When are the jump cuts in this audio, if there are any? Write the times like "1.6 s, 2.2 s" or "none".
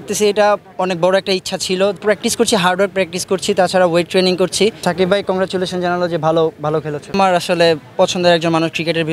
2.0 s, 4.8 s, 7.0 s